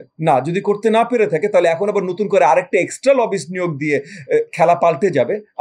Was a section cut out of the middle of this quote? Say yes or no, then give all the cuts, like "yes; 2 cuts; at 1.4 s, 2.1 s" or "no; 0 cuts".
no; 0 cuts